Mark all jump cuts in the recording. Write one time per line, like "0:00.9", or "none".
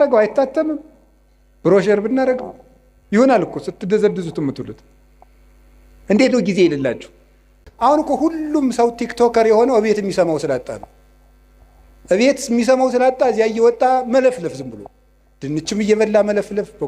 0:07.7

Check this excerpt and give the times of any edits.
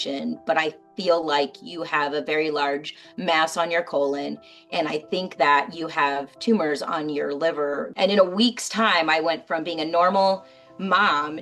0:07.9

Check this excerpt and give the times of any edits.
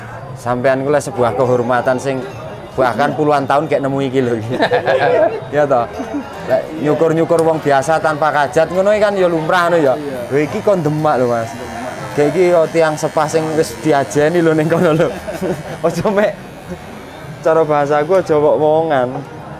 none

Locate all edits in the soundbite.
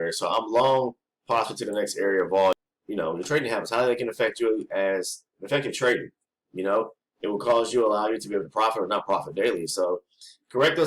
0:02.5

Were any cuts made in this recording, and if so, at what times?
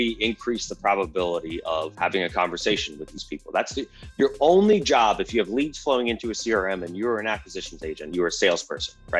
0:01.9

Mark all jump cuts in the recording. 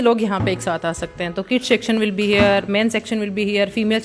none

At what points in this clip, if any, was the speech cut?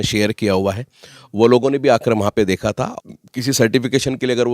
0:02.9

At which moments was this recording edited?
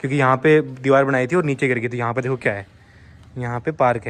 none

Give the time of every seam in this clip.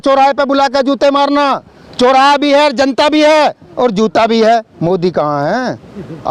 none

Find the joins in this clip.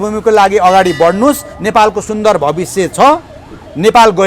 none

